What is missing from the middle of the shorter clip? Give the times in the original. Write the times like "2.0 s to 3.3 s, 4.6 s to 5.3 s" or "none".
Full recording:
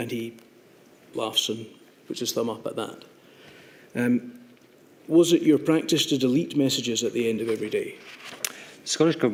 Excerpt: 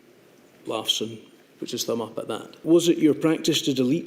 3.0 s to 4.9 s